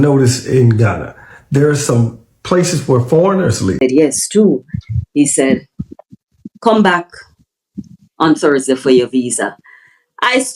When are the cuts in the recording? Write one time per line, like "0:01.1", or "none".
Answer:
0:03.8